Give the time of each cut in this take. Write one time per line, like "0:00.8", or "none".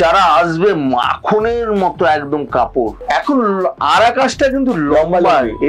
0:03.0